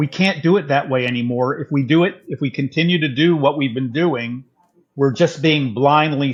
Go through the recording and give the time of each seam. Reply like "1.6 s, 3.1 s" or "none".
none